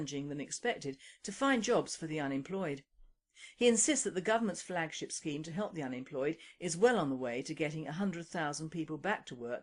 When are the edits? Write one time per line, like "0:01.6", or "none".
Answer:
none